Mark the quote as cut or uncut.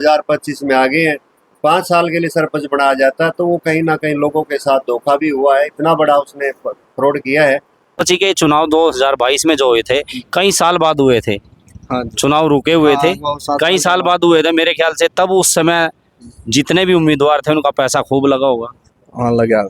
cut